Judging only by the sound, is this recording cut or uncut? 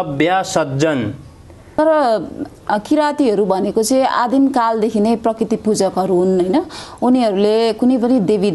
cut